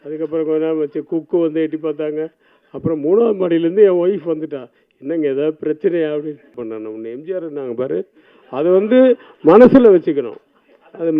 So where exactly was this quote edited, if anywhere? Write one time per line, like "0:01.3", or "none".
0:06.6